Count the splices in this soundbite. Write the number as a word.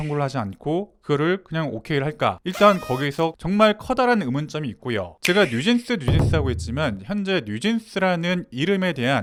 zero